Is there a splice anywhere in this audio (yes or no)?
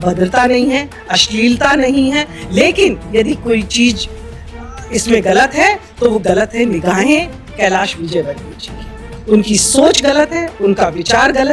no